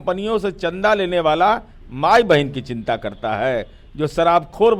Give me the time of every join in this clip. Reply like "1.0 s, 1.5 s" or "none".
none